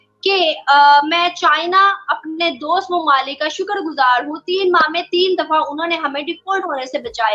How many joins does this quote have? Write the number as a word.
zero